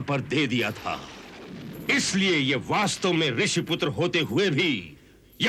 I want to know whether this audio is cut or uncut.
uncut